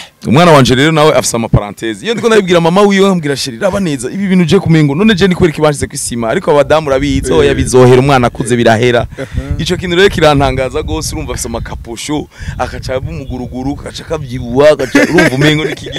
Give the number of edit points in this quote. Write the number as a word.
zero